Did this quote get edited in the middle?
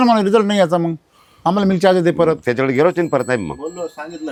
no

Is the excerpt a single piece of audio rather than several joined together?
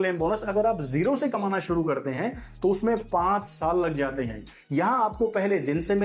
yes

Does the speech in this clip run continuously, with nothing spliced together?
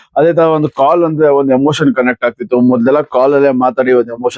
no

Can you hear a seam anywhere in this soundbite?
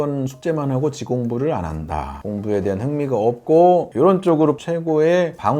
no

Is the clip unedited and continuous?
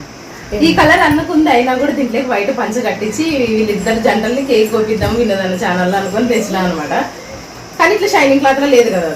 yes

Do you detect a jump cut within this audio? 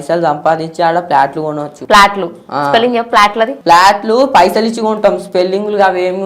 yes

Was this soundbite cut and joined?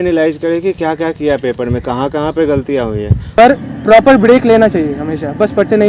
yes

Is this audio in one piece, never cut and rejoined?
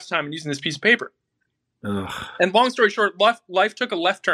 yes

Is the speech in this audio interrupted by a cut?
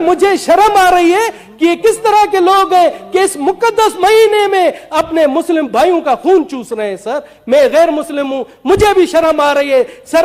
no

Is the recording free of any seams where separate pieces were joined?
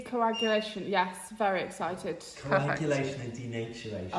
yes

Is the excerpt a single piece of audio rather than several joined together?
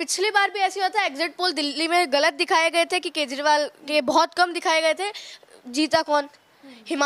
yes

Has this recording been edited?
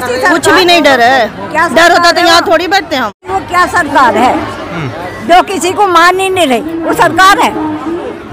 yes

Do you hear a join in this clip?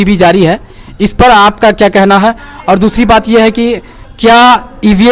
no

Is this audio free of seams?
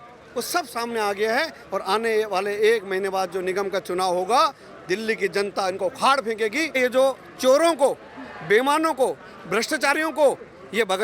no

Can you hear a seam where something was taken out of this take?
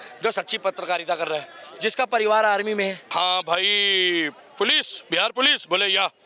yes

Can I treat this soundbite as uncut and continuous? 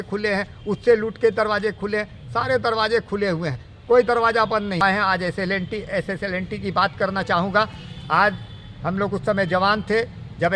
no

